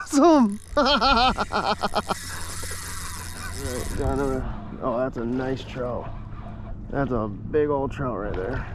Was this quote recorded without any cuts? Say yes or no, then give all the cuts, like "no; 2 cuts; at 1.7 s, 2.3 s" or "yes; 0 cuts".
no; 1 cut; at 3.5 s